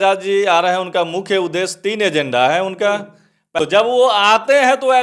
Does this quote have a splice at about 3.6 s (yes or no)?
yes